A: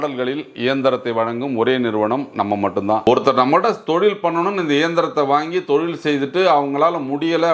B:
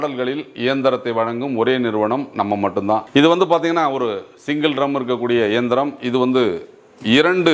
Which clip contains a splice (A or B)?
A